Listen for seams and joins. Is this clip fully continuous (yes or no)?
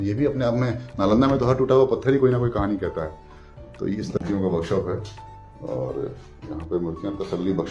no